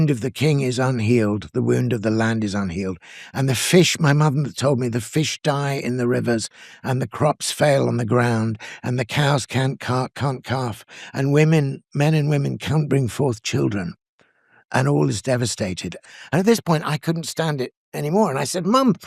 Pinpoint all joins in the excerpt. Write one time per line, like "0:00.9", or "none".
0:16.0